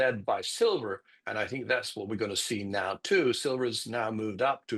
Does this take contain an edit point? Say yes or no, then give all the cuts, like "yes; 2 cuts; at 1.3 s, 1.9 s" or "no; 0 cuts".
no; 0 cuts